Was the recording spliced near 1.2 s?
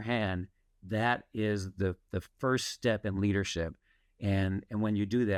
no; 0 cuts

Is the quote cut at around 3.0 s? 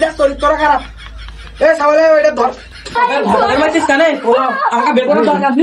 yes; 1 cut; at 3.0 s

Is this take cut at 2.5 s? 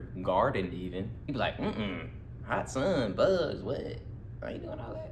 no; 1 cut; at 1.2 s

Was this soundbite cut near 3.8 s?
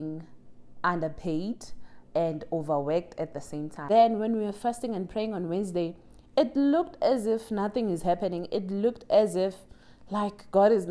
yes; 1 cut; at 3.8 s

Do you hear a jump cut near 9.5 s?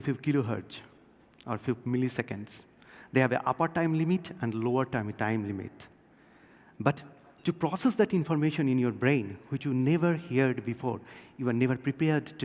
no; 0 cuts

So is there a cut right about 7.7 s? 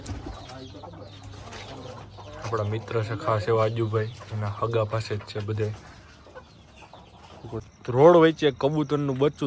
yes; 1 cut; at 7.7 s

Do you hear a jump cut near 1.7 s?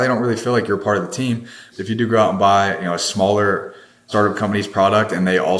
yes; 2 cuts; at 1.7 s, 4.1 s

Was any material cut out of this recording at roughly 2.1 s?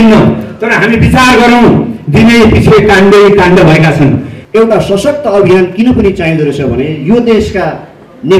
no; 1 cut; at 4.3 s

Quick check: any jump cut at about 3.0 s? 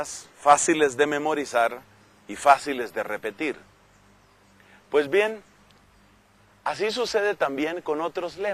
no; 0 cuts

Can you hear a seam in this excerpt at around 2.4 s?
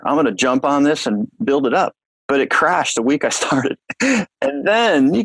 no; 0 cuts

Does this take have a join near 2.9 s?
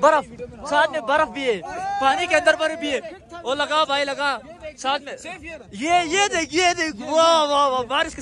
no; 0 cuts

